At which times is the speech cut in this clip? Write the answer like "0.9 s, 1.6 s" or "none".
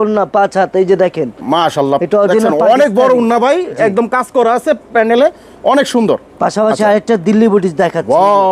none